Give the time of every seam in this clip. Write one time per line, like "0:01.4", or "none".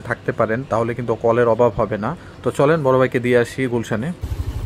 none

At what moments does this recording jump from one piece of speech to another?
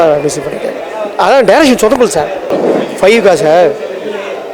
0:02.4

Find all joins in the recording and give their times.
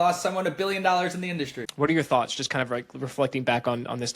0:01.6

